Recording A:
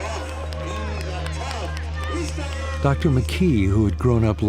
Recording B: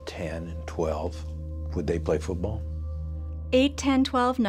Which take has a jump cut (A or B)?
A